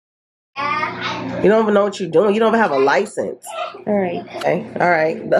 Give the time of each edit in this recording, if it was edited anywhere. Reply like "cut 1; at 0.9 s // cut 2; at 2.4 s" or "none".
cut 1; at 4.4 s